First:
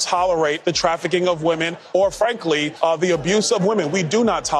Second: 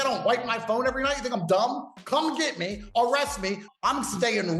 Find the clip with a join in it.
second; 1 cut; at 3.6 s

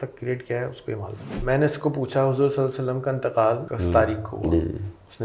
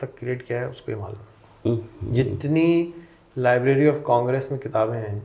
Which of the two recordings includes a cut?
first; 2 cuts; at 1.3 s, 3.7 s

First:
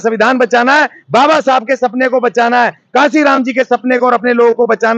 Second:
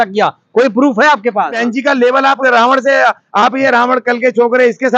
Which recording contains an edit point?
second; 1 cut; at 1.6 s

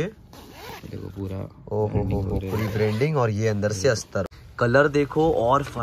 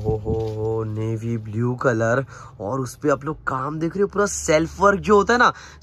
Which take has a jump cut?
first; 1 cut; at 4.3 s

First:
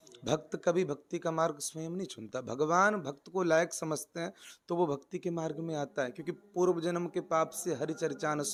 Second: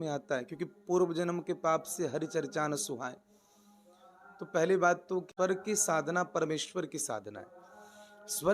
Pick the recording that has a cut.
second; 1 cut; at 5.3 s

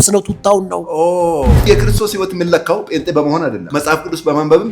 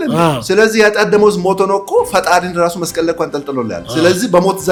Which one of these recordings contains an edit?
first; 2 cuts; at 1.6 s, 3.6 s

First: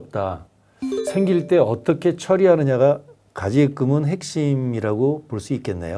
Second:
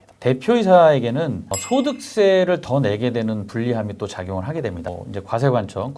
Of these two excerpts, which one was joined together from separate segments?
second; 2 cuts; at 1.5 s, 4.9 s

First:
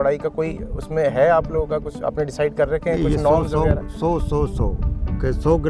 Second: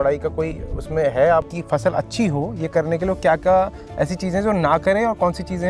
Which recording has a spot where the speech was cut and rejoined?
second; 1 cut; at 1.5 s

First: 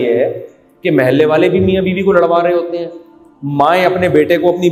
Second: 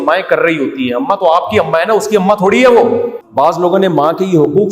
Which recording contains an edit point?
second; 1 cut; at 3.2 s

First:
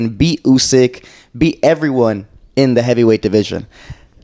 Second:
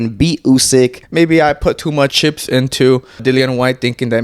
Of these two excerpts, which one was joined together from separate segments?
second; 3 cuts; at 1.0 s, 2.1 s, 3.2 s

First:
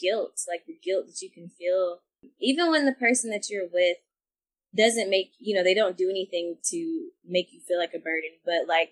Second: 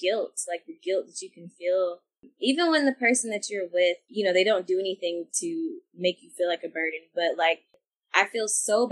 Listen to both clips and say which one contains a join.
second; 2 cuts; at 4.1 s, 7.7 s

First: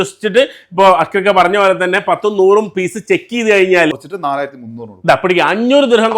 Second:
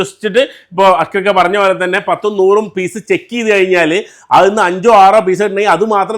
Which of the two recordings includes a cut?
first; 1 cut; at 3.9 s

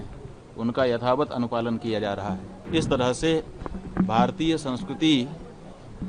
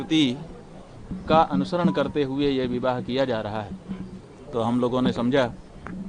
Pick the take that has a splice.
first; 1 cut; at 2.5 s

